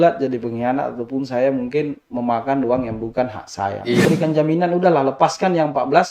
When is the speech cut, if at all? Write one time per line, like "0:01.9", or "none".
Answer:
0:04.0